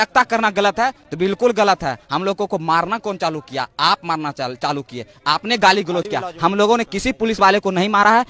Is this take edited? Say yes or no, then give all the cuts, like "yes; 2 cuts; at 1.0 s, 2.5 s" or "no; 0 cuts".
no; 0 cuts